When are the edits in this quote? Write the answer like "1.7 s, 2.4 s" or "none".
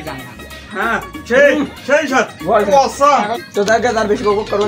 none